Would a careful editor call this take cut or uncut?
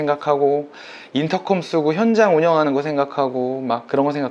uncut